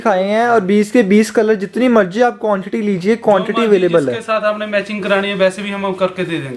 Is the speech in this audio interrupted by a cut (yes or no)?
no